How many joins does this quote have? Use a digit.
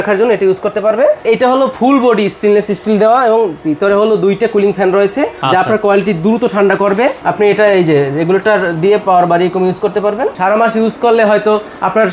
4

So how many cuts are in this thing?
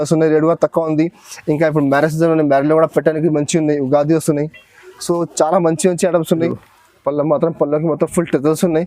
1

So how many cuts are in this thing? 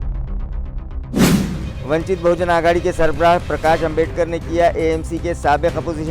1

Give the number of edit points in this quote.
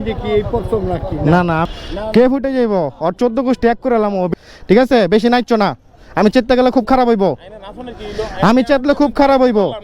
2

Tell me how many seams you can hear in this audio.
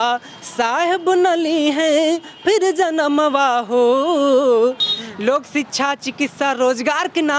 1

